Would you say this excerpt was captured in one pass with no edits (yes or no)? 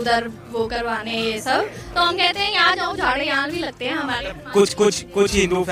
yes